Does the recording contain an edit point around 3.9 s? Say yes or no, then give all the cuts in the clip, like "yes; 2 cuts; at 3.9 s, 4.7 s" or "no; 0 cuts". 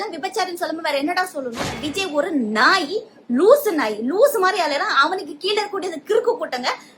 no; 1 cut; at 1.8 s